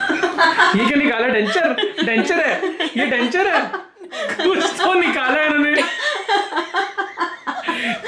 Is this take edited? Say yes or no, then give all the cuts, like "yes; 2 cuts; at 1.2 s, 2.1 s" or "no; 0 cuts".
no; 0 cuts